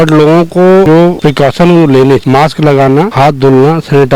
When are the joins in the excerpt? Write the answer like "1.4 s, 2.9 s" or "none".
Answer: 1.0 s, 2.2 s, 3.1 s